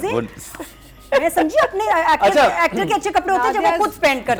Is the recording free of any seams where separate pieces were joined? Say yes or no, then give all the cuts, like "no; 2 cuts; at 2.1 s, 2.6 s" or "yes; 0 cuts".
yes; 0 cuts